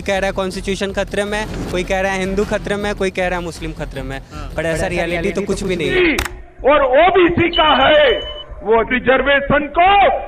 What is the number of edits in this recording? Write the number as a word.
one